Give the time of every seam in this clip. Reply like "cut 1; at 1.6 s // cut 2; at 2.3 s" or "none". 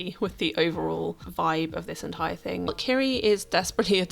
cut 1; at 2.7 s